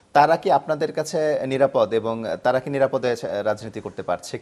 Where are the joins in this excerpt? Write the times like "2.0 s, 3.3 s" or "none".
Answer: none